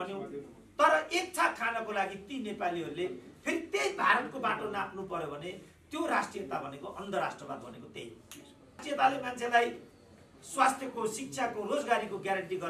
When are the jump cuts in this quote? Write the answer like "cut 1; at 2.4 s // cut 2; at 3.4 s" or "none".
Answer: cut 1; at 8.8 s